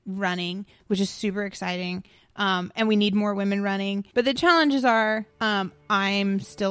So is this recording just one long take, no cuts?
no; 2 cuts; at 4.0 s, 5.3 s

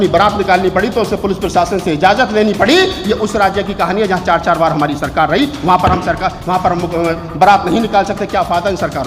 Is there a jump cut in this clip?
no; 0 cuts

